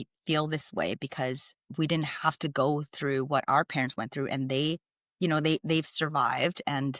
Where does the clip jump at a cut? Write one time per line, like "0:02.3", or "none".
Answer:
none